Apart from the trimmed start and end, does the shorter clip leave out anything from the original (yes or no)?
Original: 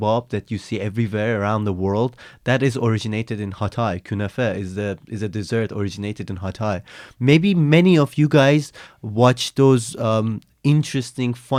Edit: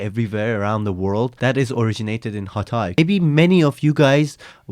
yes